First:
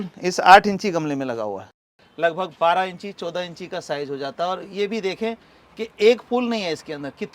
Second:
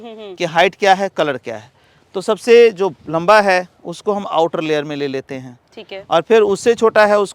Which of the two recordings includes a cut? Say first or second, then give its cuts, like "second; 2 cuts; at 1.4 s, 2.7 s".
first; 1 cut; at 1.7 s